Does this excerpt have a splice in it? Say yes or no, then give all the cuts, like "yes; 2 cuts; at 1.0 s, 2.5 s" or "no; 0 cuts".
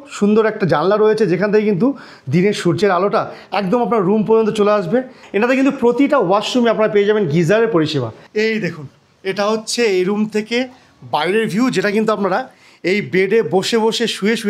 yes; 2 cuts; at 5.2 s, 8.2 s